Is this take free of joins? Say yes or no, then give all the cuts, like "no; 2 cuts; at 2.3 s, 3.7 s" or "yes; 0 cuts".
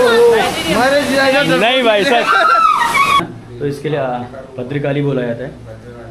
no; 1 cut; at 3.2 s